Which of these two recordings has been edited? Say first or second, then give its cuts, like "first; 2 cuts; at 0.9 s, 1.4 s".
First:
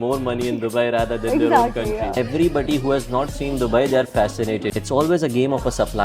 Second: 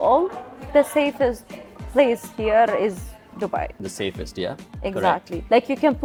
first; 2 cuts; at 2.1 s, 4.7 s